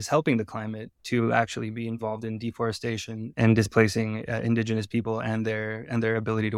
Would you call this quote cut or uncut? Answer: cut